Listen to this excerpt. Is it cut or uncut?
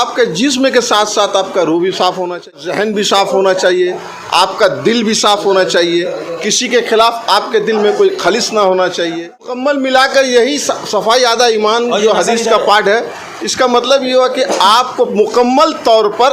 cut